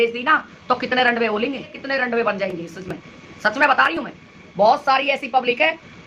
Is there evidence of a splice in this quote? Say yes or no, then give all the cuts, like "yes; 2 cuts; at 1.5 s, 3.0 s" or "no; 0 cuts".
no; 0 cuts